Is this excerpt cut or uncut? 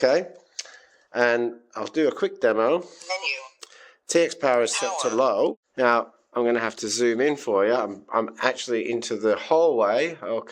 cut